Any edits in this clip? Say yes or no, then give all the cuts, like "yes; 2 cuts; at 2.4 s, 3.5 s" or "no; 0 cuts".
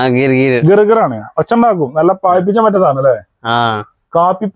no; 0 cuts